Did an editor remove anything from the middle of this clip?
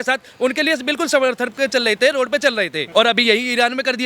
yes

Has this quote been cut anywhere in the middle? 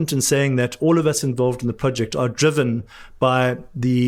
no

